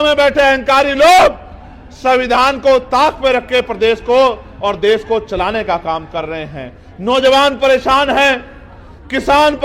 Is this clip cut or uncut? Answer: uncut